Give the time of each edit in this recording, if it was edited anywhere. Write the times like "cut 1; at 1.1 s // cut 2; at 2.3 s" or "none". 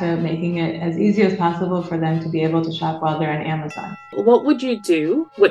cut 1; at 4.2 s